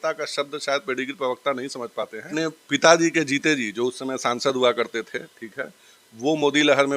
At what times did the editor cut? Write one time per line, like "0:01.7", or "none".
0:02.3